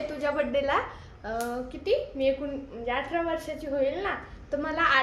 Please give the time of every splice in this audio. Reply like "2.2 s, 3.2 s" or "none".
none